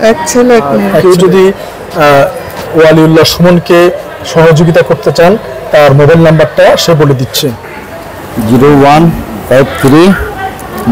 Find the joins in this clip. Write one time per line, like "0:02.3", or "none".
0:01.0